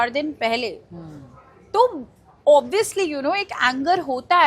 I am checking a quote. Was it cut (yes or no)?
no